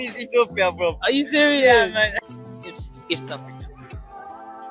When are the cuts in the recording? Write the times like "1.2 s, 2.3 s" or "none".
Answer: 2.2 s